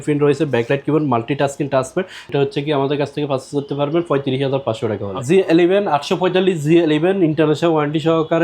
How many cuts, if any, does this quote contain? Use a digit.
2